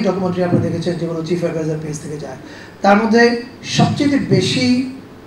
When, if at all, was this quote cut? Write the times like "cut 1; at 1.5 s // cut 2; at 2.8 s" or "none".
none